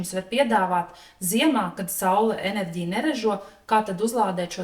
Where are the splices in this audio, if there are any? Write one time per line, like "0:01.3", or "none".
none

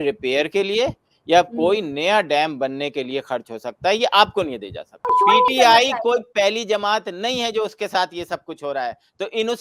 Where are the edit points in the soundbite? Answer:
0:05.1

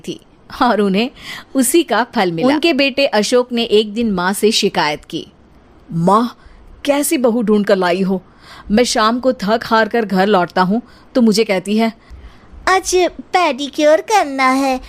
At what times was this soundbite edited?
0:02.4

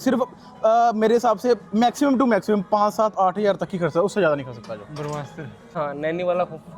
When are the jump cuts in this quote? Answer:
0:05.7

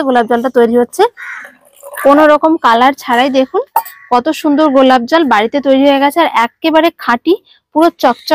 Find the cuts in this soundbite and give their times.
0:01.3

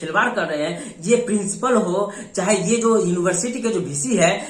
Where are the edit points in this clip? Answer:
none

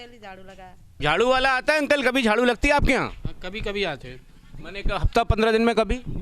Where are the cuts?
0:00.9

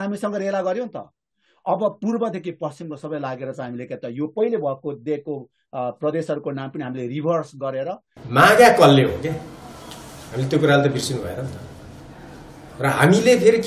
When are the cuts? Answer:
0:08.1

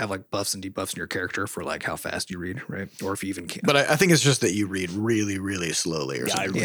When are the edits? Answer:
0:03.5

